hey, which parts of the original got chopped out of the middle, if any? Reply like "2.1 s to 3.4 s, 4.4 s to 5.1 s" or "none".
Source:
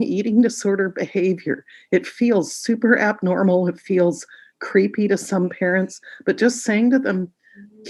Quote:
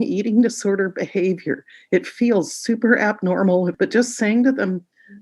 3.7 s to 6.2 s